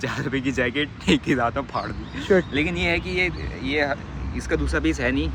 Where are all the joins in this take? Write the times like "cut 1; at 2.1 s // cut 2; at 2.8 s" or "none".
none